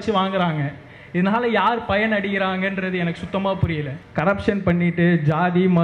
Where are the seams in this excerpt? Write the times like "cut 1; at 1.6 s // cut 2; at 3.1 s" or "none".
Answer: cut 1; at 4.0 s